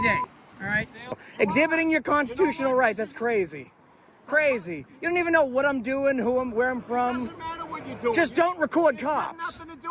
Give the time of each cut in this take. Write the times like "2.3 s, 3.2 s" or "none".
1.2 s